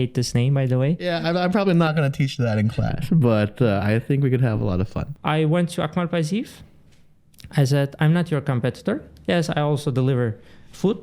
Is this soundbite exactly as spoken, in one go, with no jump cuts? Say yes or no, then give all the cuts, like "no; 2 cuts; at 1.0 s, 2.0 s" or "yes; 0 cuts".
no; 2 cuts; at 1.0 s, 5.1 s